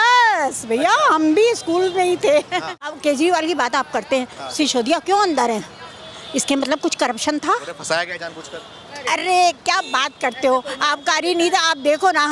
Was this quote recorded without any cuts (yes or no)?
no